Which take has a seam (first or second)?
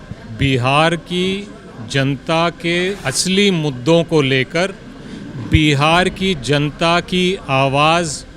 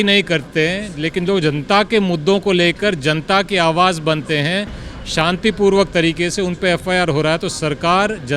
first